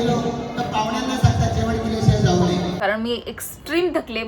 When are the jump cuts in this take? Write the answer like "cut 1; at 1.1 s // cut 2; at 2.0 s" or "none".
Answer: cut 1; at 2.8 s